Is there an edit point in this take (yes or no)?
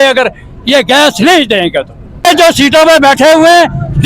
yes